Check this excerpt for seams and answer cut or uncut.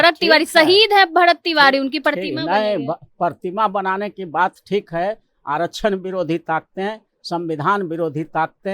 uncut